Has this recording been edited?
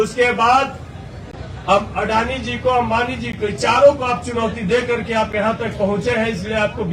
no; 0 cuts

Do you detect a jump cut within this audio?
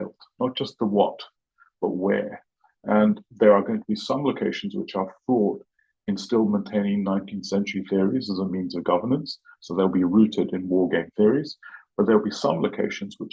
no; 0 cuts

